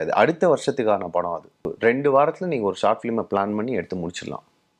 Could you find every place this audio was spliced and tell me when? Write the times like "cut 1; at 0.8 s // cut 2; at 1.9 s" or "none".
cut 1; at 1.7 s